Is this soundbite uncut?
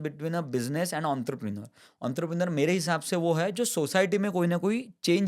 yes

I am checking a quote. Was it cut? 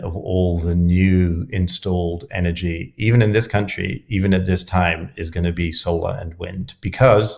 no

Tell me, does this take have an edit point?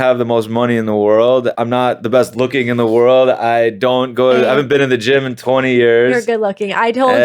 yes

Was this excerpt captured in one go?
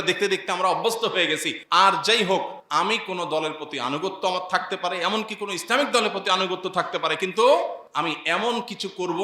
no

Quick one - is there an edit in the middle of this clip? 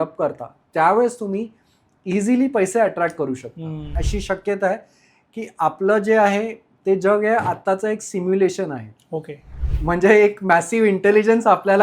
yes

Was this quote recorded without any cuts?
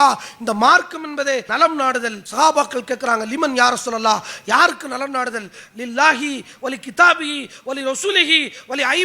no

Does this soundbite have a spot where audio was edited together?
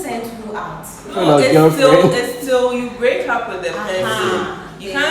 yes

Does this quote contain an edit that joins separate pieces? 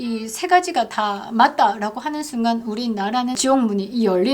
yes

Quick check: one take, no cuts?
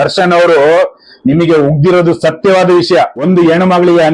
no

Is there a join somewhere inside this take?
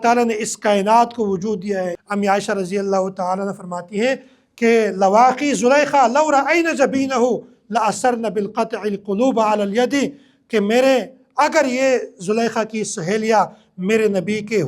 yes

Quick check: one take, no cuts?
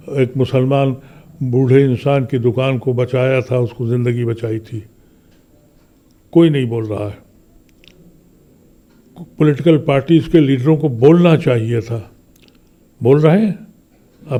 yes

